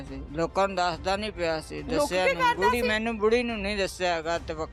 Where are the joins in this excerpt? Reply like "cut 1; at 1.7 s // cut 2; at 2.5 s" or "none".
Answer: none